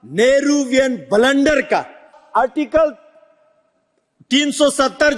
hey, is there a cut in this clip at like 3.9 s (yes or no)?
no